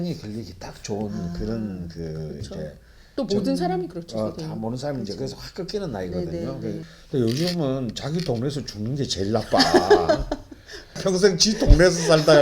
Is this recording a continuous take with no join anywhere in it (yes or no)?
no